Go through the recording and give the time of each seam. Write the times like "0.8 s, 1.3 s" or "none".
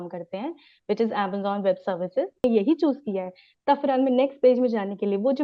2.4 s